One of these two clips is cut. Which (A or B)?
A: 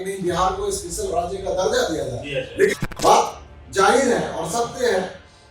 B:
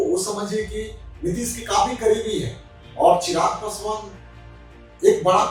A